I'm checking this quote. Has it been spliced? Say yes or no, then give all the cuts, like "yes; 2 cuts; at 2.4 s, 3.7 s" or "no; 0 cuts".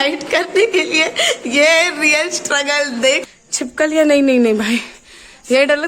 yes; 1 cut; at 3.2 s